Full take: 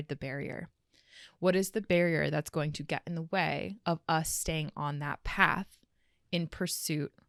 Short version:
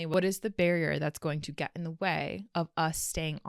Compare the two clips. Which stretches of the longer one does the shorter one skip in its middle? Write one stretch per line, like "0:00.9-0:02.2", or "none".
none